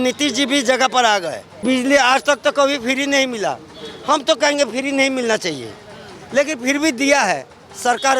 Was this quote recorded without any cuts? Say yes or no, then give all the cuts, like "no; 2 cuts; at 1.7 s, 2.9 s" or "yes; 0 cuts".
no; 1 cut; at 1.6 s